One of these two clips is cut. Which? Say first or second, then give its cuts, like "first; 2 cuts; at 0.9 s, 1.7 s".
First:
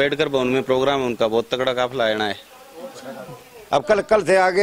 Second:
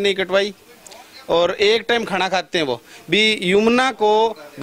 first; 1 cut; at 3.4 s